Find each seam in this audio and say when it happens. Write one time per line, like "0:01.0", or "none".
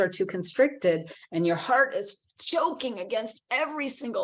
none